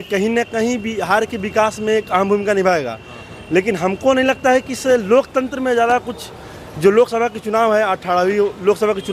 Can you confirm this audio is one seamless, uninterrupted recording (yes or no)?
yes